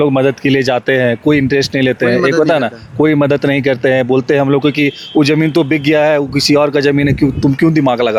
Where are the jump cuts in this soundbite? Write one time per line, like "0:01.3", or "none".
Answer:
none